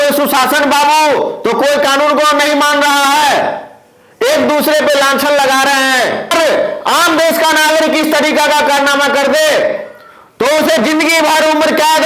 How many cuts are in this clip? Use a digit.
1